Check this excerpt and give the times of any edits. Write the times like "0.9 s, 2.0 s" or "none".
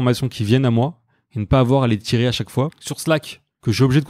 2.8 s